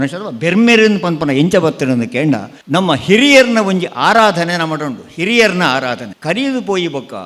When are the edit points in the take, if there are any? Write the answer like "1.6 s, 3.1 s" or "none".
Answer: 2.5 s, 6.1 s